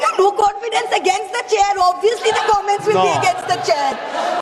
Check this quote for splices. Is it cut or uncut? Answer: uncut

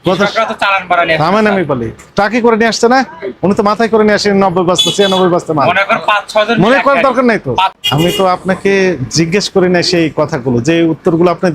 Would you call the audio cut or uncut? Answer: cut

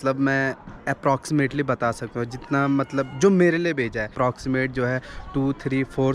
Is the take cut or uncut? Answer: cut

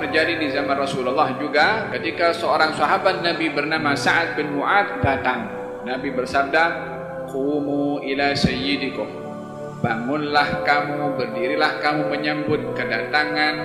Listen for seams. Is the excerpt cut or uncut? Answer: uncut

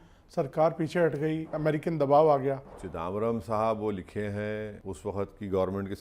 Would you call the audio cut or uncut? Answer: cut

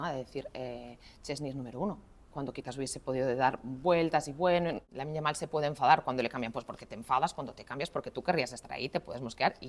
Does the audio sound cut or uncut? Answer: cut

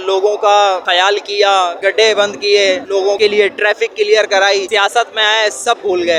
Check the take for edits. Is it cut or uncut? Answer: uncut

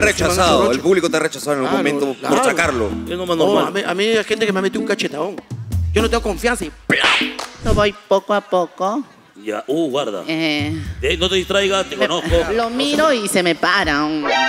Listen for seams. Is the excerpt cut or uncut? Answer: cut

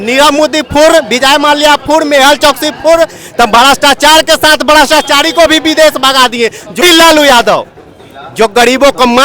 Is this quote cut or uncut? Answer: cut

